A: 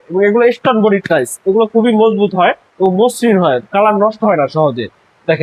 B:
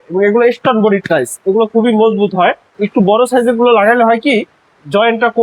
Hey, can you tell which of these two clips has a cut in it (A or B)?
B